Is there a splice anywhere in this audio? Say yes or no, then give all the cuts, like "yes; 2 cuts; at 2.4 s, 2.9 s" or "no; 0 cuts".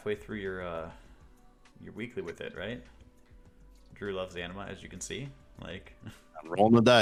no; 0 cuts